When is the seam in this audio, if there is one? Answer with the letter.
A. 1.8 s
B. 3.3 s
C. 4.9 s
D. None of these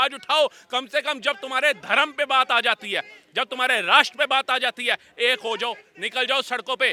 D